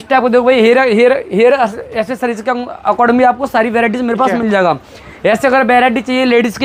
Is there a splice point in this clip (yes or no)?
no